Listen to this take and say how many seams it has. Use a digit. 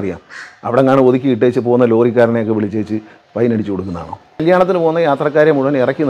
1